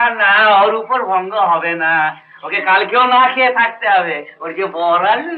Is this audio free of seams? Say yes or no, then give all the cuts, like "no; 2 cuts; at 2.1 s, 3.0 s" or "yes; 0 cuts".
yes; 0 cuts